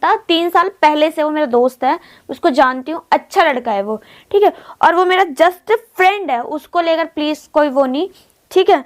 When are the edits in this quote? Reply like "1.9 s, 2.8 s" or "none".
none